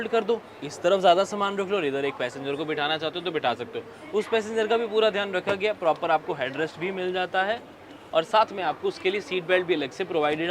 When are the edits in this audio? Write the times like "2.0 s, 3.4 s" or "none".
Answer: none